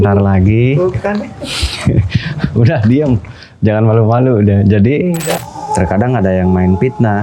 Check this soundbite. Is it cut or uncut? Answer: cut